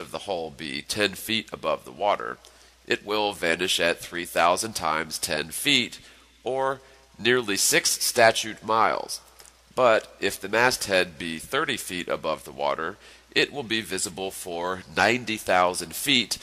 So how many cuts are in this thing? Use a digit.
1